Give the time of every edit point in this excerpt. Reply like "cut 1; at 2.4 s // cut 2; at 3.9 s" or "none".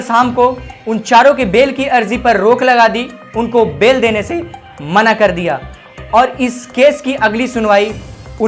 none